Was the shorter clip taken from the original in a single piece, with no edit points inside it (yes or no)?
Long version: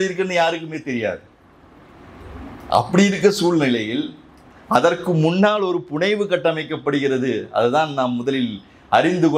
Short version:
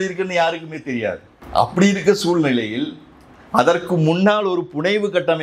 no